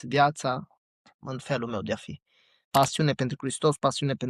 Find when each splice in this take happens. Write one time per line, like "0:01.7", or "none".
0:02.7